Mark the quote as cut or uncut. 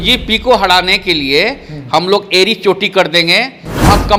uncut